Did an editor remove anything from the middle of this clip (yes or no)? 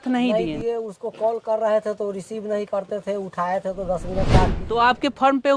yes